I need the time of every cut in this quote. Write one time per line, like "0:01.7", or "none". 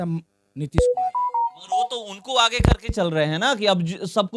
none